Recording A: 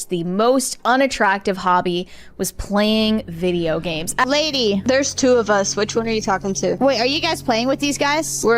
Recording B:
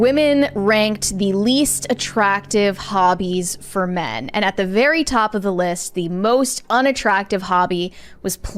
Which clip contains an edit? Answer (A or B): A